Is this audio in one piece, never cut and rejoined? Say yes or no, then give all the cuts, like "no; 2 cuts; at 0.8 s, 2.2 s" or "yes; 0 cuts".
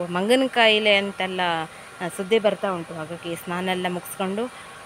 yes; 0 cuts